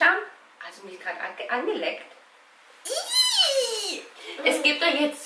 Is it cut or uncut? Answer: uncut